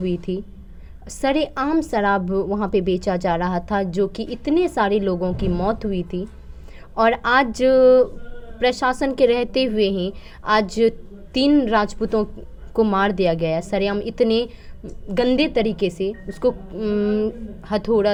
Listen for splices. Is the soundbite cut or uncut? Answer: uncut